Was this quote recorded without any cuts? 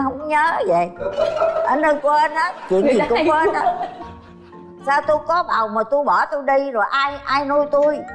yes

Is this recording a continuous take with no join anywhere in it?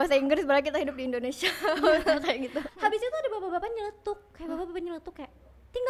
no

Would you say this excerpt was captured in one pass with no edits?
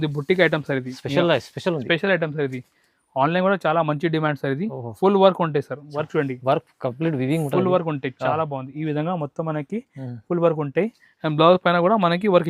yes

